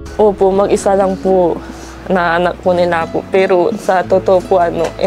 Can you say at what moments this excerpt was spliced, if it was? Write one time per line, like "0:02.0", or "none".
none